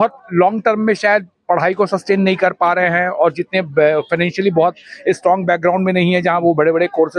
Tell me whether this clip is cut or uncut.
uncut